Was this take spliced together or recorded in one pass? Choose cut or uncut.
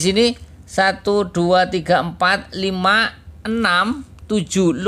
uncut